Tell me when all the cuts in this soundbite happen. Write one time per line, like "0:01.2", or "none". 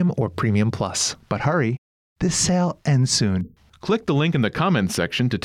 0:01.1